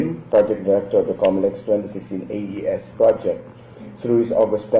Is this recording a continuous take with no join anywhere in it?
no; 1 cut; at 3.6 s

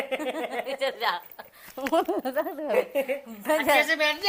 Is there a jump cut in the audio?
no; 0 cuts

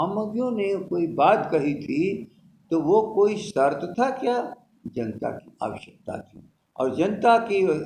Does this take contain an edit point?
no; 0 cuts

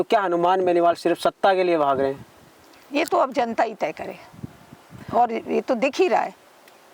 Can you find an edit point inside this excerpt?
no; 0 cuts

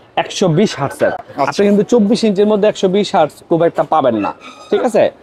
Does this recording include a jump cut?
no; 0 cuts

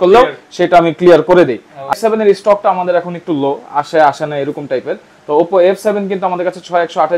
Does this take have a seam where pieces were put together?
yes; 1 cut; at 1.9 s

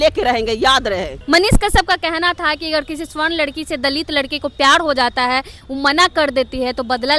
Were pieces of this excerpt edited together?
yes; 1 cut; at 1.2 s

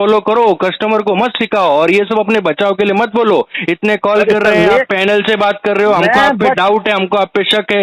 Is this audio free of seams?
yes; 0 cuts

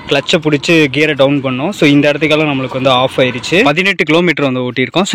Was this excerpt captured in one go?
no; 1 cut; at 3.7 s

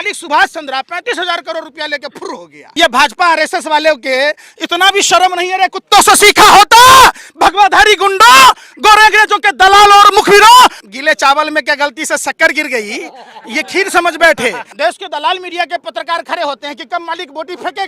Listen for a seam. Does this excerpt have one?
yes; 3 cuts; at 2.5 s, 10.8 s, 14.7 s

